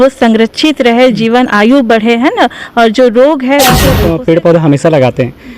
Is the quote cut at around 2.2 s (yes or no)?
no